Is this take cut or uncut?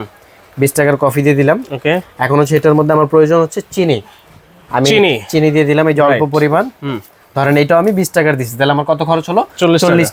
uncut